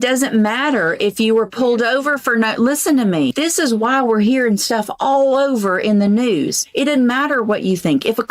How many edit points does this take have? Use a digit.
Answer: 2